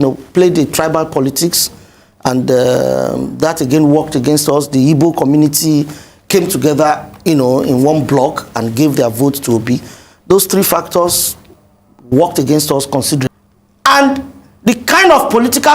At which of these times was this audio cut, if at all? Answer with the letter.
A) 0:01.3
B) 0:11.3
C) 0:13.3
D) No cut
C